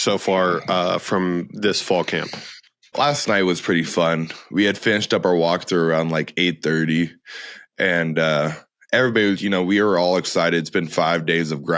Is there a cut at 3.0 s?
yes; 1 cut; at 3.0 s

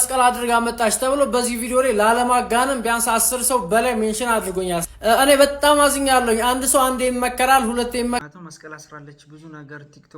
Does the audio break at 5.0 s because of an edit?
no; 1 cut; at 8.2 s

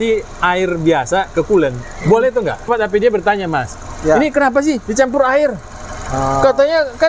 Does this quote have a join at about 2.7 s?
yes; 1 cut; at 2.7 s

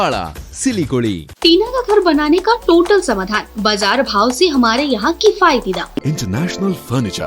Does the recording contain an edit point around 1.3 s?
yes; 2 cuts; at 1.3 s, 6.0 s

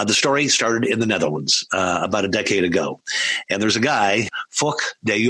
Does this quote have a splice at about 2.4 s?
no; 1 cut; at 4.3 s

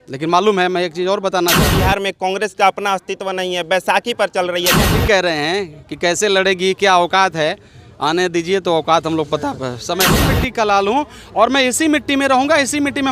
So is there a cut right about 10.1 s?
yes; 3 cuts; at 1.7 s, 5.0 s, 10.1 s

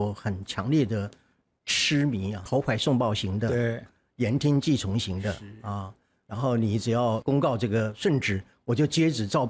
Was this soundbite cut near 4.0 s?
no; 2 cuts; at 2.4 s, 7.2 s

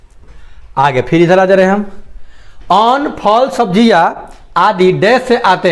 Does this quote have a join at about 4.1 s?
no; 0 cuts

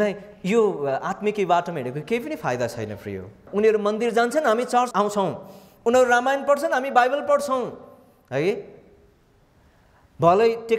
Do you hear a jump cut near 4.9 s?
yes; 2 cuts; at 3.4 s, 4.9 s

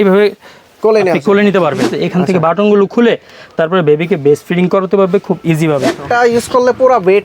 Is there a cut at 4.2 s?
no; 2 cuts; at 1.9 s, 6.0 s

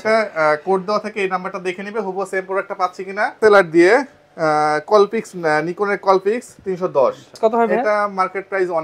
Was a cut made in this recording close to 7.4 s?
yes; 2 cuts; at 3.4 s, 7.4 s

